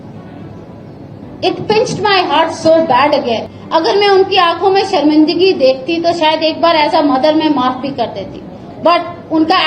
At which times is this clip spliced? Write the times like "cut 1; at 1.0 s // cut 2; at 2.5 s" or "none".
cut 1; at 3.5 s